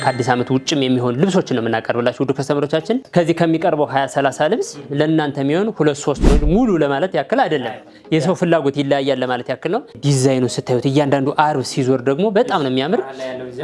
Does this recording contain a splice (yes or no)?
yes